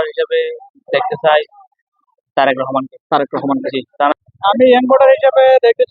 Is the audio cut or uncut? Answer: cut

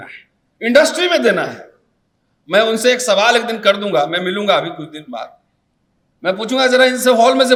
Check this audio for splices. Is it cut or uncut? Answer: uncut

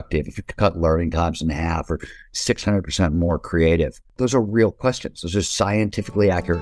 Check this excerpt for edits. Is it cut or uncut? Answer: cut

